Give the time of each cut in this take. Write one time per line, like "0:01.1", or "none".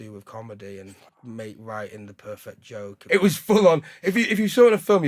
0:03.0